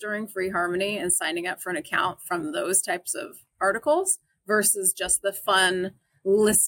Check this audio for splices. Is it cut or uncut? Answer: uncut